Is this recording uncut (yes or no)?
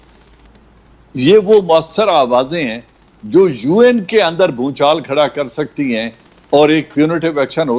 yes